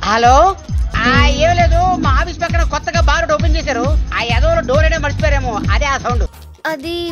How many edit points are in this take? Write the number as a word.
two